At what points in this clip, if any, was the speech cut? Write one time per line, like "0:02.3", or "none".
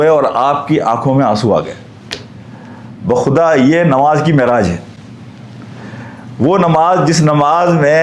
none